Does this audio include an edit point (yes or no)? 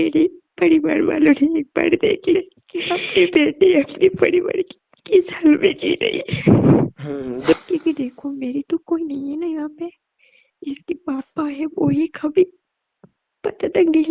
yes